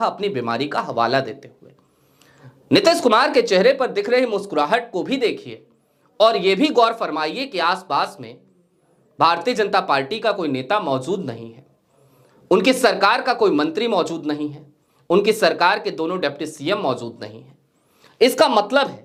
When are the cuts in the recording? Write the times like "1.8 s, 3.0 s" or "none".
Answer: none

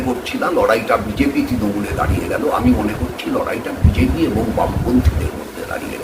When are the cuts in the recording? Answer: none

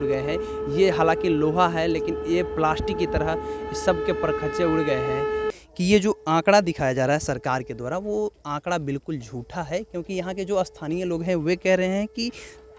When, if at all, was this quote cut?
5.5 s

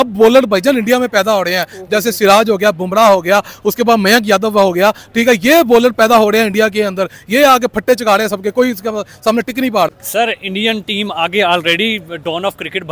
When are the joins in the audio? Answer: 9.9 s

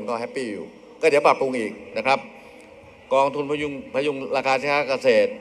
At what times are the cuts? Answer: none

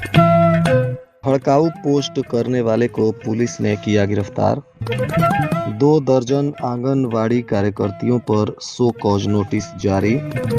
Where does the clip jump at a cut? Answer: 1.0 s

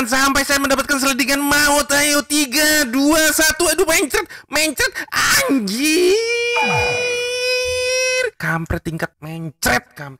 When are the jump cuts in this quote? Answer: 8.4 s, 9.2 s

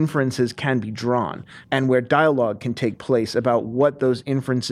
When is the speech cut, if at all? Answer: 1.5 s

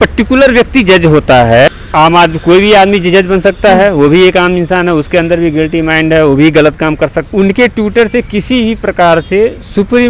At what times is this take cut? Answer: 1.7 s, 7.2 s

